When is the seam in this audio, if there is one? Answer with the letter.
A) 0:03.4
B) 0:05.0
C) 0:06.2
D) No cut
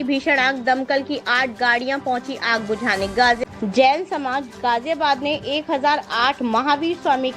A